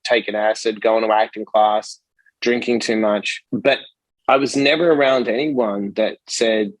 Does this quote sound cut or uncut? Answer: cut